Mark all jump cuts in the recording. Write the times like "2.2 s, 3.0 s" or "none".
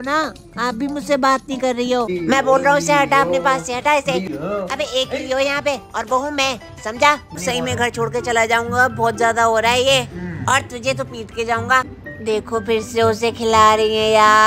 2.1 s, 4.3 s, 7.4 s, 12.0 s